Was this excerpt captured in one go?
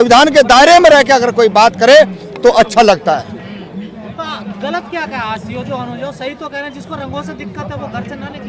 yes; 0 cuts

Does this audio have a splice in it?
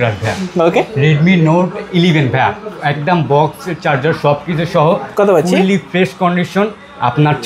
no; 0 cuts

